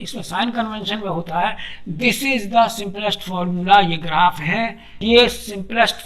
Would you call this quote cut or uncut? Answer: cut